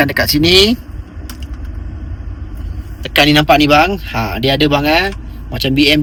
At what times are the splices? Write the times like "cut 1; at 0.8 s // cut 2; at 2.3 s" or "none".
none